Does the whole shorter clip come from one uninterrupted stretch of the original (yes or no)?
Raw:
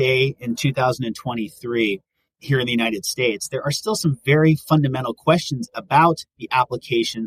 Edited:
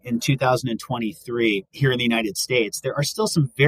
no